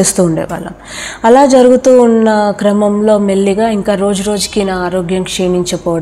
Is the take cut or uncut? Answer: uncut